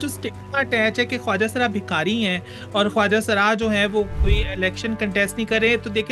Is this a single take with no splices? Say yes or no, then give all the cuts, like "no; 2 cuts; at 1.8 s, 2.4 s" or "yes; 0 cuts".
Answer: no; 1 cut; at 4.2 s